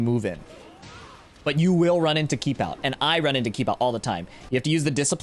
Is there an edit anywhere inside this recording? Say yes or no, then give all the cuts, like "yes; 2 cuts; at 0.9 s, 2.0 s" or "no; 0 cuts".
no; 0 cuts